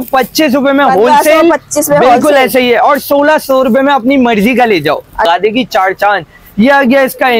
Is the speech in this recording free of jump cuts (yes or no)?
no